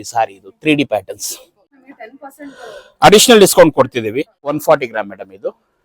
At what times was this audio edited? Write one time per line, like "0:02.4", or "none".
0:01.9
0:04.6